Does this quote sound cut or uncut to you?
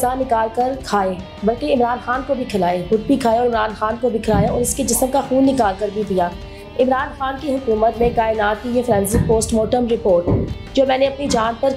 uncut